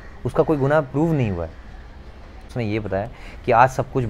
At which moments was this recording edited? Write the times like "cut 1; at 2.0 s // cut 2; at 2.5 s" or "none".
cut 1; at 2.5 s